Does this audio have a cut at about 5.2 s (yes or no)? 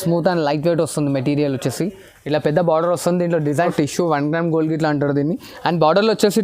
no